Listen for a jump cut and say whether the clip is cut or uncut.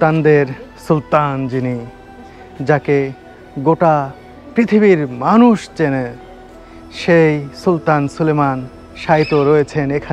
uncut